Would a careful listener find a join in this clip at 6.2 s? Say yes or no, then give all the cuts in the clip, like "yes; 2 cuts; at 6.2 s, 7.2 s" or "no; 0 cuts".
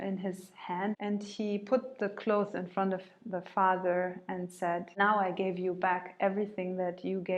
no; 2 cuts; at 1.0 s, 4.9 s